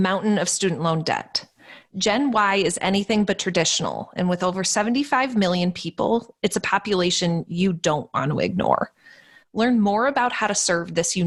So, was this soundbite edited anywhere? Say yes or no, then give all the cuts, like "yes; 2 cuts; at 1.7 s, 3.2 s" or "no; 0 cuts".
no; 0 cuts